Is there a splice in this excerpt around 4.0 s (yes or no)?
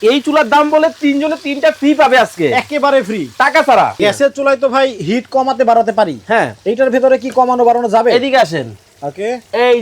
yes